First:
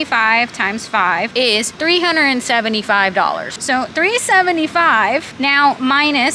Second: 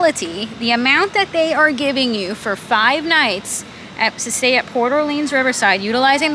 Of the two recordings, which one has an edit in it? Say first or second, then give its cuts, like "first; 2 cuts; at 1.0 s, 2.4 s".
first; 3 cuts; at 1.6 s, 3.5 s, 5.3 s